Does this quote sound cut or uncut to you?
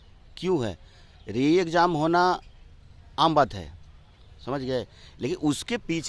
uncut